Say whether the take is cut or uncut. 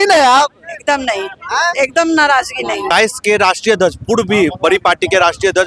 cut